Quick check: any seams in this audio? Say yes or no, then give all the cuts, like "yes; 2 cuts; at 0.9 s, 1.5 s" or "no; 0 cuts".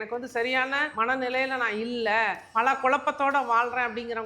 yes; 2 cuts; at 0.9 s, 2.4 s